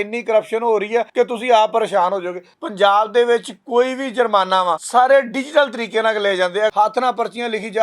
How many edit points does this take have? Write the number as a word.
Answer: four